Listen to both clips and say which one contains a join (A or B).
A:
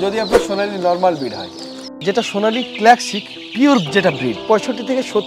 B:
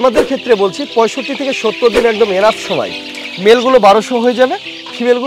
A